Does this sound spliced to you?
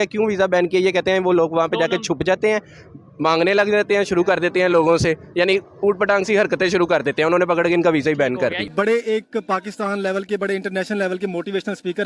yes; 1 cut; at 8.6 s

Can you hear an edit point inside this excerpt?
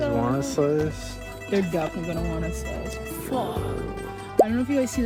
no; 0 cuts

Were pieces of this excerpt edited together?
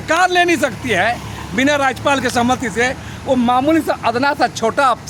no; 0 cuts

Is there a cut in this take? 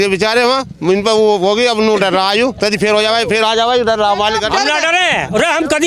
no; 0 cuts

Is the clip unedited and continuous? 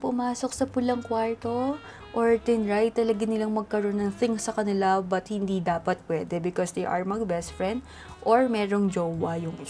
yes; 0 cuts

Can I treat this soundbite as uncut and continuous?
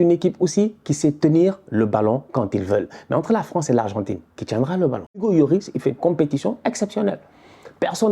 no; 1 cut; at 5.2 s

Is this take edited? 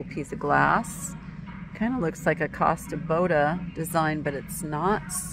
no; 0 cuts

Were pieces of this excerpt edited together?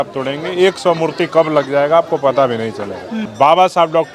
no; 0 cuts

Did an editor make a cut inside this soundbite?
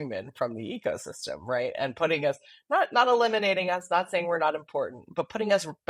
no; 0 cuts

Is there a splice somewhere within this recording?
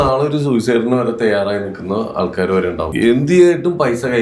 yes; 1 cut; at 2.9 s

